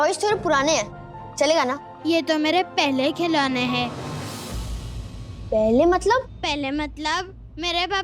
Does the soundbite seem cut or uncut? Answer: cut